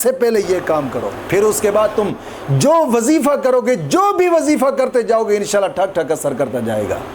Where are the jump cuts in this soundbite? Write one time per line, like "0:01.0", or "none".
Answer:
0:01.2

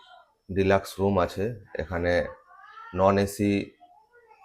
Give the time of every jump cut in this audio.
none

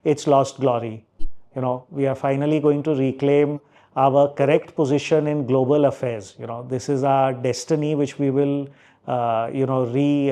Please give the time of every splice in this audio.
none

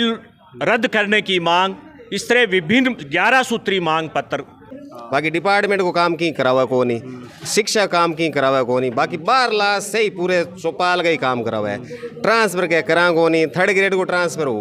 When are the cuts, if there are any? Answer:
0:04.7

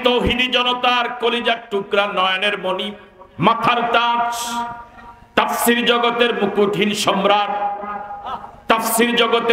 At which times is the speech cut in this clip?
none

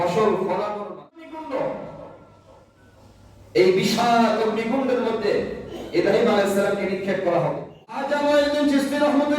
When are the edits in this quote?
0:01.2
0:08.1

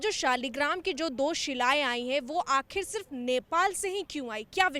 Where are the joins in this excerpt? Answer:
none

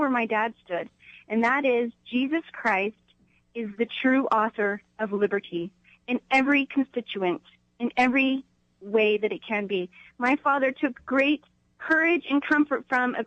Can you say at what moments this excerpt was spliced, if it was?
none

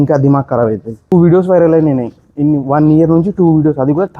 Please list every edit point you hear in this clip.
0:01.1

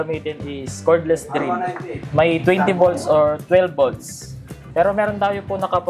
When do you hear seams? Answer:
none

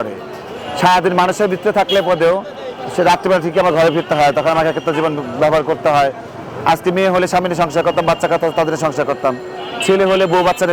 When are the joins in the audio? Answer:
none

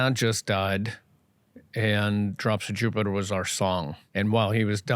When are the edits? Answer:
0:04.0

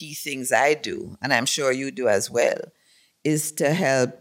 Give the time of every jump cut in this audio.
none

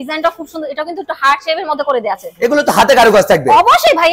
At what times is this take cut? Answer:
none

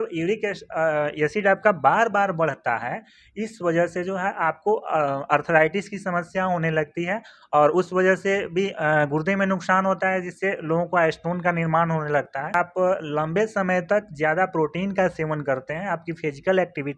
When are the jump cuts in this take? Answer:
0:12.5

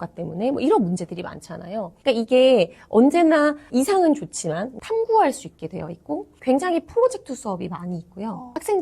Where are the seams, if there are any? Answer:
0:04.7

